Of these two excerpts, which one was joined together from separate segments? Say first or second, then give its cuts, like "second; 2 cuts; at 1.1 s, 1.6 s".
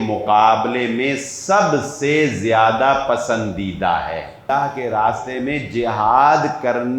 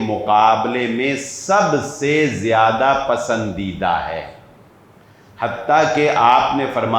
first; 1 cut; at 4.4 s